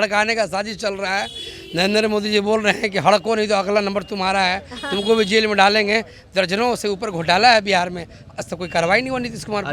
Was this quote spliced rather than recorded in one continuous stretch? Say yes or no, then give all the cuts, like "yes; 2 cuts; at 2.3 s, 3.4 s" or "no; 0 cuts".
no; 0 cuts